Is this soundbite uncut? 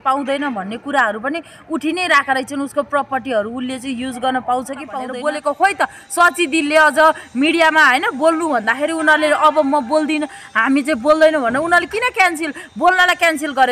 no; 1 cut; at 5.0 s

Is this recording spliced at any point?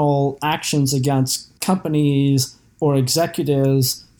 yes; 1 cut; at 1.5 s

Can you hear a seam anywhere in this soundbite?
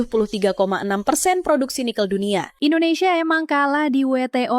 yes; 1 cut; at 2.5 s

